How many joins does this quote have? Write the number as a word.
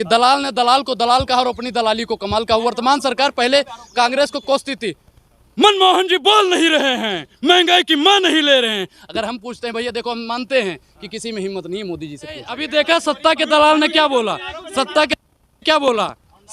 one